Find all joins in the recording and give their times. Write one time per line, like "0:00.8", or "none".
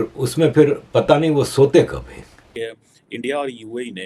0:02.4